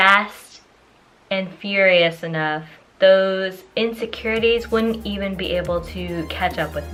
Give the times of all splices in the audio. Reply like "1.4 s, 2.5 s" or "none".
none